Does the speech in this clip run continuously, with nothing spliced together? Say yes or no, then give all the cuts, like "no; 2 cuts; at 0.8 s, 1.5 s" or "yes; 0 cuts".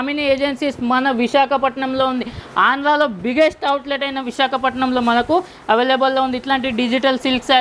yes; 0 cuts